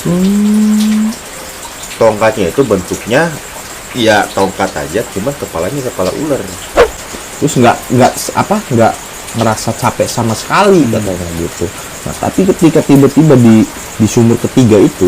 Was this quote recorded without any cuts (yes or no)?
no